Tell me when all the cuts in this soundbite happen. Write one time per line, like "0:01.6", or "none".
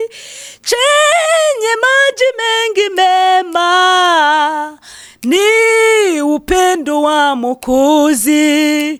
none